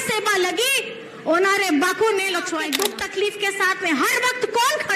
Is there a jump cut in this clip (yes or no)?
yes